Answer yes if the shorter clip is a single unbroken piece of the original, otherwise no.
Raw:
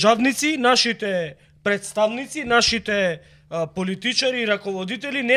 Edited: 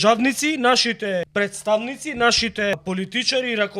no